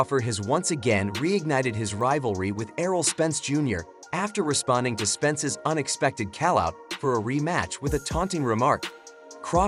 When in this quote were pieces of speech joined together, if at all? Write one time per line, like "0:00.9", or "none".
none